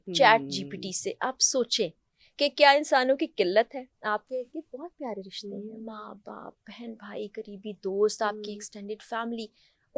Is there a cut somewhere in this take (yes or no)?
no